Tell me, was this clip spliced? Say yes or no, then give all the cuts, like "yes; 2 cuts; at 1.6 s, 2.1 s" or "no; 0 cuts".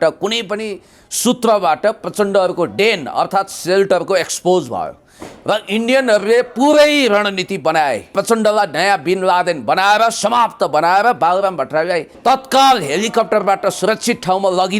yes; 2 cuts; at 8.1 s, 12.1 s